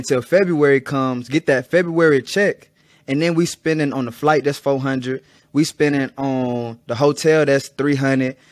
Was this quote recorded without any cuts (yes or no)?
yes